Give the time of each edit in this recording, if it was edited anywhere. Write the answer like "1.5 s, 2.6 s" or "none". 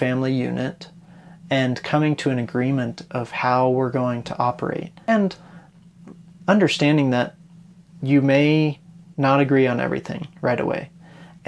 5.1 s